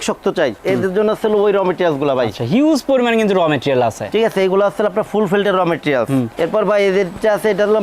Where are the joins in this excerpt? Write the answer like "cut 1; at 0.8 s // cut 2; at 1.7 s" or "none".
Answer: none